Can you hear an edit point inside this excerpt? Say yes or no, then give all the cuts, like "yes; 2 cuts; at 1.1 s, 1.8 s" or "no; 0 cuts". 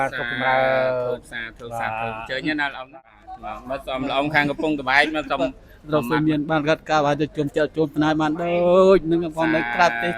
yes; 1 cut; at 2.8 s